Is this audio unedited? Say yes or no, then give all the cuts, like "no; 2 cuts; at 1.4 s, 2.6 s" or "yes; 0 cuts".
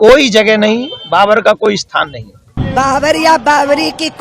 no; 1 cut; at 2.5 s